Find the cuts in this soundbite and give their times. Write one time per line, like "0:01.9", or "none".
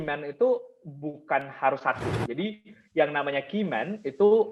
none